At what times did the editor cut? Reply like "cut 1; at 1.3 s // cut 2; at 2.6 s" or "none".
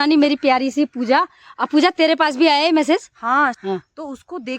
cut 1; at 3.6 s